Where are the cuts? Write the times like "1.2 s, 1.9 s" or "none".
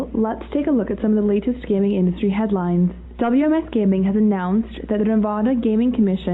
1.1 s